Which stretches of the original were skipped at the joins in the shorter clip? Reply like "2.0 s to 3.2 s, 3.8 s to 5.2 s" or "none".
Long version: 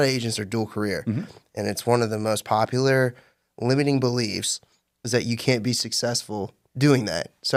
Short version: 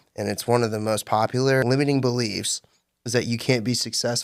3.0 s to 3.6 s